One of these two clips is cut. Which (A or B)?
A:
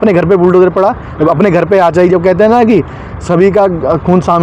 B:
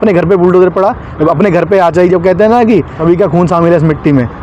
B